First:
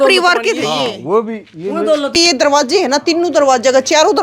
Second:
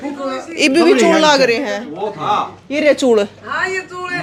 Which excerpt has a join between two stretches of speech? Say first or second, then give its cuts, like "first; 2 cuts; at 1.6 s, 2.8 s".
first; 1 cut; at 2.1 s